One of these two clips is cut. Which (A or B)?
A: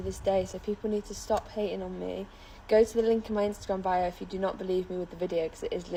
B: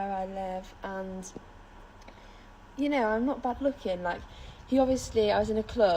B